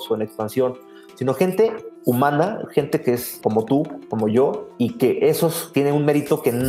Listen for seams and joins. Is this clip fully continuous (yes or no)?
no